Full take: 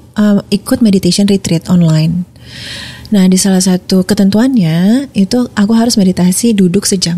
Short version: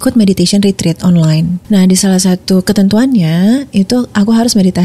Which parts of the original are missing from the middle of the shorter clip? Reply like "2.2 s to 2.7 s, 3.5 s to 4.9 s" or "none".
2.2 s to 3.0 s